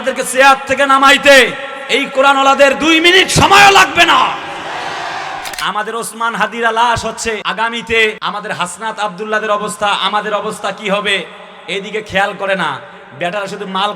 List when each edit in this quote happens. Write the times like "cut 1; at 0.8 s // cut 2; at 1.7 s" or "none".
cut 1; at 5.5 s // cut 2; at 7.4 s // cut 3; at 8.2 s